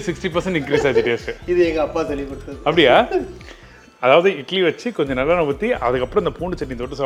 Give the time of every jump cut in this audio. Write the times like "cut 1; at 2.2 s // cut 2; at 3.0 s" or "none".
none